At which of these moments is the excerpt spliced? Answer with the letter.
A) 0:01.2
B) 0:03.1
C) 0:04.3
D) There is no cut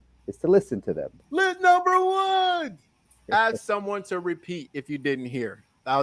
A